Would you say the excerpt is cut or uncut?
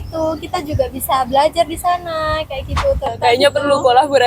cut